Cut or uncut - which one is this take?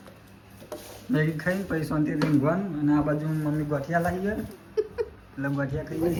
uncut